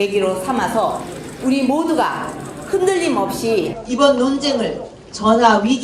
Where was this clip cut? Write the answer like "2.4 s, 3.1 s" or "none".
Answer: 1.1 s

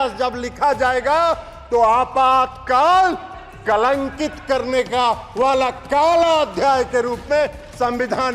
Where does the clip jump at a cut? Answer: none

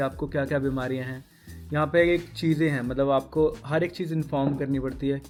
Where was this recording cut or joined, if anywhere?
none

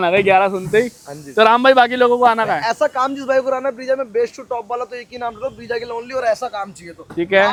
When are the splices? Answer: none

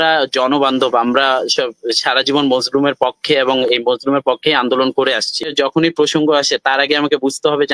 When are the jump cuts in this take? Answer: 5.5 s

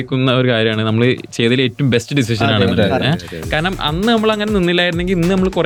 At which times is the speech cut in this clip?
none

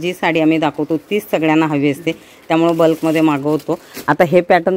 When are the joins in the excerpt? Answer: none

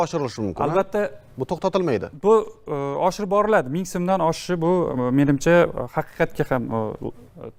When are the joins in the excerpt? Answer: none

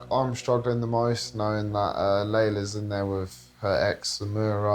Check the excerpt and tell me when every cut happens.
none

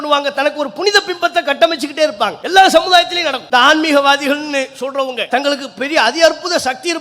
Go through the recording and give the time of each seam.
2.4 s, 3.4 s, 5.2 s

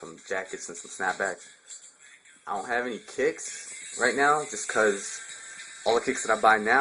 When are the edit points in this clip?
3.4 s

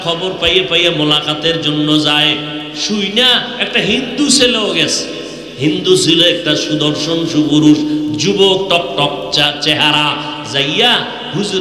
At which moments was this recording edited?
none

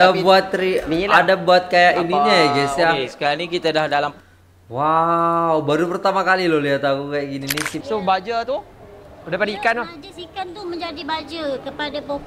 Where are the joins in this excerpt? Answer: 7.7 s

